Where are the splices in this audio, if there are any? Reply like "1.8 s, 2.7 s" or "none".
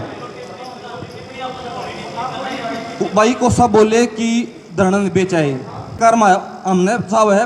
6.0 s